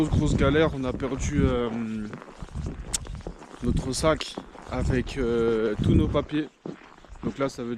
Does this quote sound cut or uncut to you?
uncut